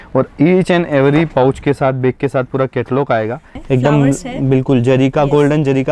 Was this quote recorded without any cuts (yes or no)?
no